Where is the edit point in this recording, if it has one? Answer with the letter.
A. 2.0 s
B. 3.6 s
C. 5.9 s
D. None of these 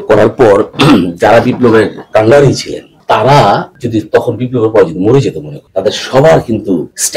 A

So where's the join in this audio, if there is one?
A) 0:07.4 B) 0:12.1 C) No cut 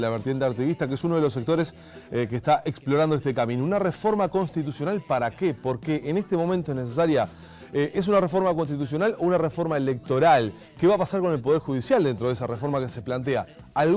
A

